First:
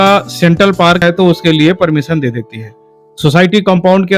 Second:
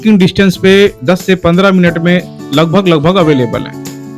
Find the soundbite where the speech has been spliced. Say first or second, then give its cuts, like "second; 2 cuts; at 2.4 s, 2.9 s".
first; 1 cut; at 1.0 s